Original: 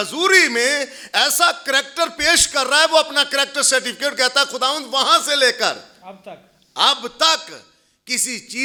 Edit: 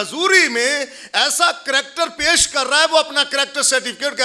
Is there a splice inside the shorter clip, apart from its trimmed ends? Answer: no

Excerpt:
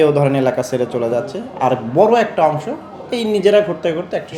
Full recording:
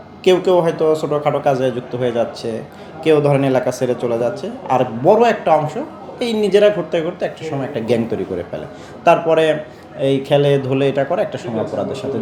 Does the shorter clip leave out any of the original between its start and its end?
no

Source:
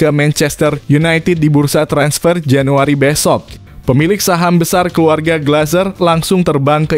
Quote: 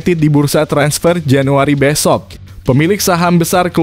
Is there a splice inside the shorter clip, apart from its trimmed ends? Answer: no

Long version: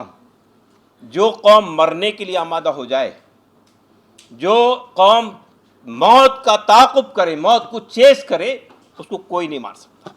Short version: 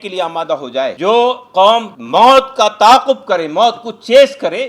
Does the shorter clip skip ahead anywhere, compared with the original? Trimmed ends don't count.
yes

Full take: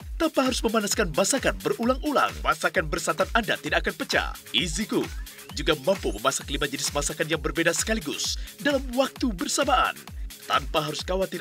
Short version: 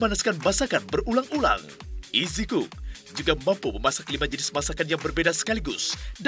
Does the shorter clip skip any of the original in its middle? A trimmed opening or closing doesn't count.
yes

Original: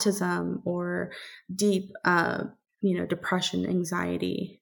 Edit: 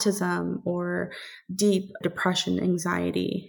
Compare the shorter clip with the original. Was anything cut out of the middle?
yes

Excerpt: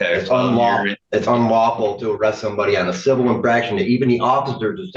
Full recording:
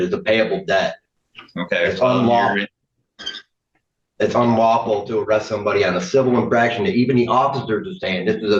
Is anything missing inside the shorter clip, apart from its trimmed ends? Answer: yes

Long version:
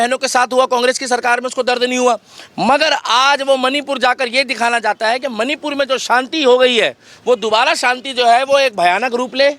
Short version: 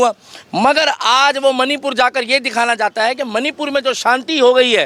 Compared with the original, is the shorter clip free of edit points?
yes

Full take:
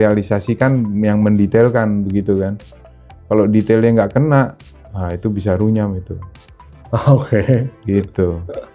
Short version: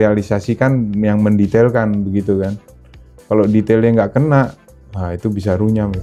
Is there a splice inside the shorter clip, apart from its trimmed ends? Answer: no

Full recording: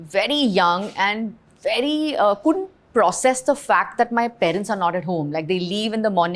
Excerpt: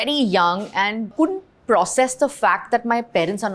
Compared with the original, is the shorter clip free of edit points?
no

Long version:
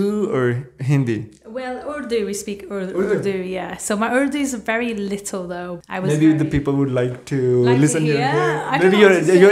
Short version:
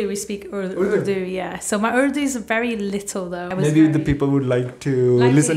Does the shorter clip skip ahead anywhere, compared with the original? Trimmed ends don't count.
yes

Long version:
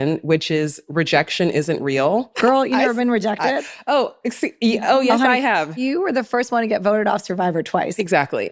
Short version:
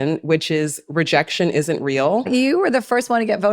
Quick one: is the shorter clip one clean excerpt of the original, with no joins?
no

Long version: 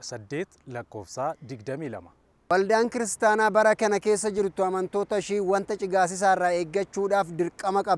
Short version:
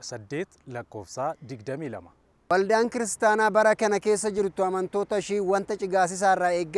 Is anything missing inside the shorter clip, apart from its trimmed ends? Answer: no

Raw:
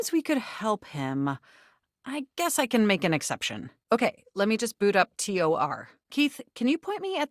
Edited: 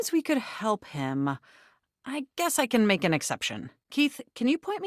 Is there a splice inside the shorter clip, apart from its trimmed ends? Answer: yes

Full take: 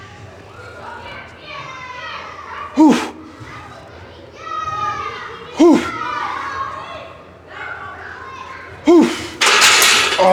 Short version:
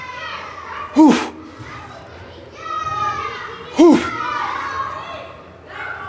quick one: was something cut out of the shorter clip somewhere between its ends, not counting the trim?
no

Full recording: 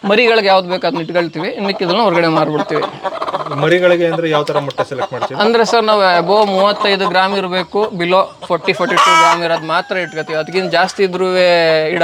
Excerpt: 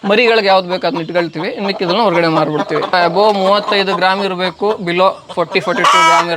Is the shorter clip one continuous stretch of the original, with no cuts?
no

